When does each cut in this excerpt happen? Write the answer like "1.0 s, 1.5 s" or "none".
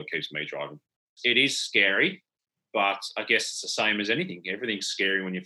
1.1 s